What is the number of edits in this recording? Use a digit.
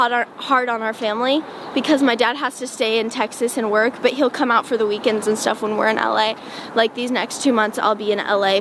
0